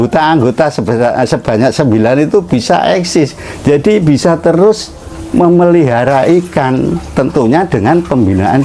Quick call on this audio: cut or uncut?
uncut